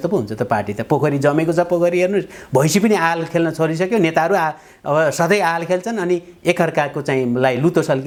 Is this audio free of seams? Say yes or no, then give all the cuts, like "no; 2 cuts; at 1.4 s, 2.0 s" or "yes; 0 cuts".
yes; 0 cuts